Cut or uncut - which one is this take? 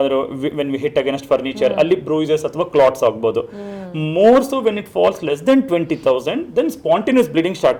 uncut